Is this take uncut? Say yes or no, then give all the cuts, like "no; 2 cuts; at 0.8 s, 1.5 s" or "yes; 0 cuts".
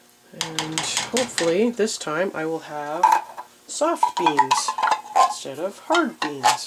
yes; 0 cuts